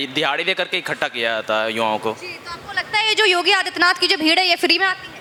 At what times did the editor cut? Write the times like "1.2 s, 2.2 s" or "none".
none